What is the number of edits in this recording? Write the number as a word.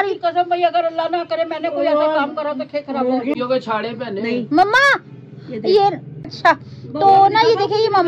two